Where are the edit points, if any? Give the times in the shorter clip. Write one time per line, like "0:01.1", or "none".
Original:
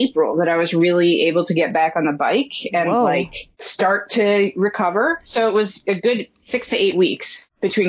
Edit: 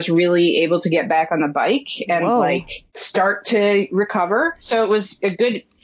none